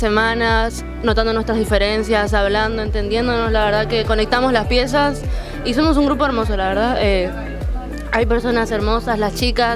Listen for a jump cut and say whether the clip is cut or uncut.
uncut